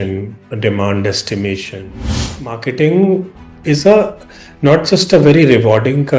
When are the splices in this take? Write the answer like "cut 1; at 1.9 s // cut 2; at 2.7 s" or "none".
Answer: cut 1; at 2.3 s